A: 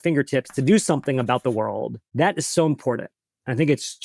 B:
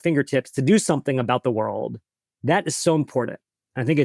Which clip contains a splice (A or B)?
A